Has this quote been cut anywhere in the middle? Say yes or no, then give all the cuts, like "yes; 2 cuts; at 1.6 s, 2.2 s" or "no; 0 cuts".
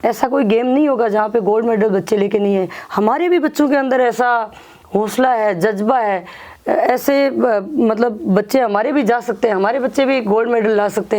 no; 0 cuts